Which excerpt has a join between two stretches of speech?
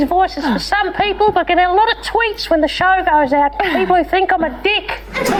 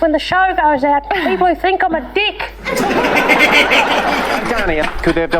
second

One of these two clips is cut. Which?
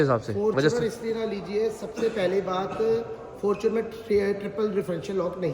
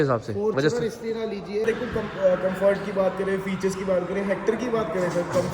second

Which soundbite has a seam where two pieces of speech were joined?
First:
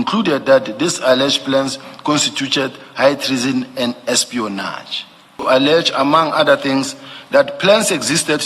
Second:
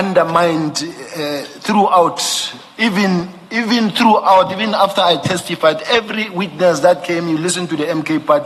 first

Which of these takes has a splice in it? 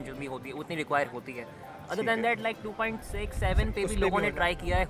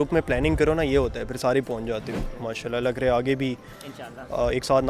second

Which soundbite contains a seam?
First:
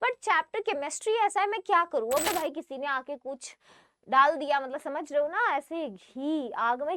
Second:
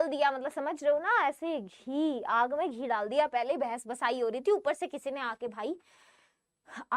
first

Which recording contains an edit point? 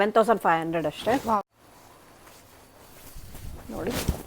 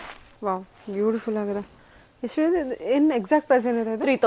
first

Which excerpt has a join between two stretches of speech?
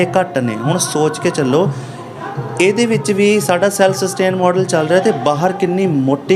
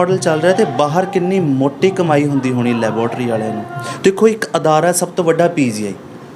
second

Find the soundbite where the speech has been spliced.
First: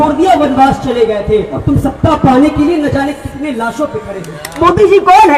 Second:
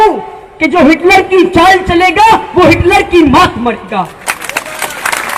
first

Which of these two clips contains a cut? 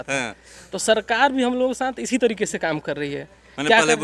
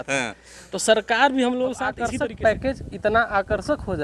second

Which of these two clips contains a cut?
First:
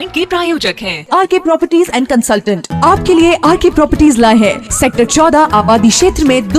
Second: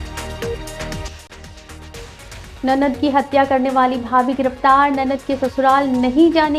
second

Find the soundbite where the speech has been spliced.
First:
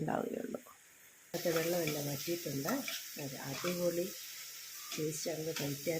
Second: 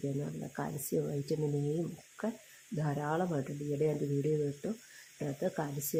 first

